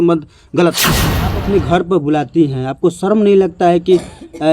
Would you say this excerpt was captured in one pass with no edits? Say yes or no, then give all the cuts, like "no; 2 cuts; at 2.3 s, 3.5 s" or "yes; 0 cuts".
no; 1 cut; at 1.4 s